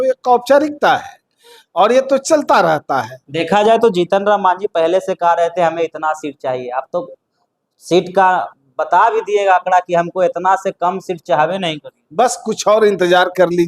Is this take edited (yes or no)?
yes